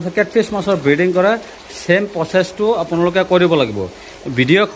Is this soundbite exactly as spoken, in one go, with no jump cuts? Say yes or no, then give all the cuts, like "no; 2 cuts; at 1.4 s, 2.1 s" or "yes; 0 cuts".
yes; 0 cuts